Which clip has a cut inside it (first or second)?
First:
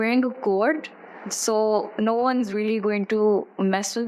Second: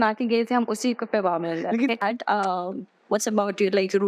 second